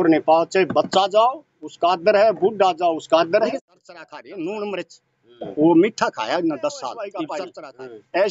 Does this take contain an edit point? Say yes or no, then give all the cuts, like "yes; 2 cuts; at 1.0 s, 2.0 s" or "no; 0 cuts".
yes; 2 cuts; at 3.6 s, 7.4 s